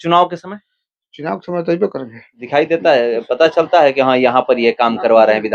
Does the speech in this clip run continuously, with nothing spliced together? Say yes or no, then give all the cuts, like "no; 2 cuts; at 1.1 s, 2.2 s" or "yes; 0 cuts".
no; 1 cut; at 2.4 s